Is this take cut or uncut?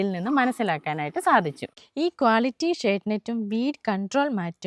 cut